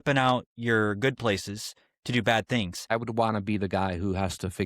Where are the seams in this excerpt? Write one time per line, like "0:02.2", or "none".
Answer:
0:02.7